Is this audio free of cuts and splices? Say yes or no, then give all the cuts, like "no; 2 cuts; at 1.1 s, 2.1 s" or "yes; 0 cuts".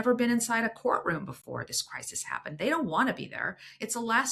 yes; 0 cuts